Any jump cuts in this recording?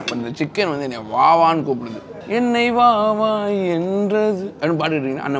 no; 0 cuts

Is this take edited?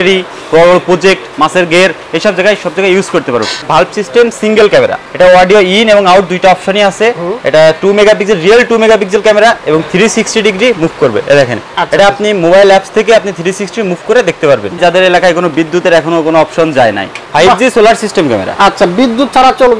yes; 4 cuts; at 3.6 s, 5.0 s, 14.8 s, 17.2 s

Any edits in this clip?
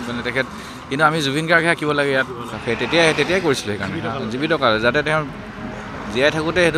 yes; 1 cut; at 2.5 s

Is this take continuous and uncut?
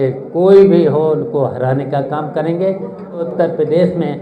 no; 1 cut; at 3.3 s

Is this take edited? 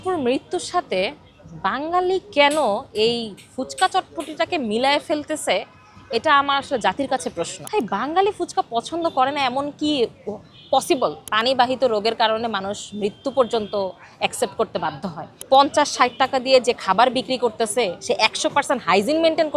yes; 3 cuts; at 7.6 s, 11.3 s, 15.3 s

